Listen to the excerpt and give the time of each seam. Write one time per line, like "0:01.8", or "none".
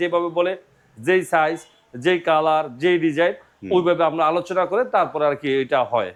none